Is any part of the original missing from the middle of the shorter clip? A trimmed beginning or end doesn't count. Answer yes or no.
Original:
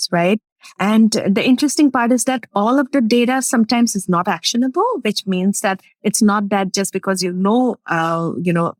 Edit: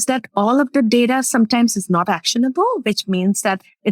no